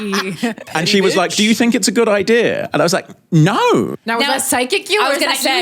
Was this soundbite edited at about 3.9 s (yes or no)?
yes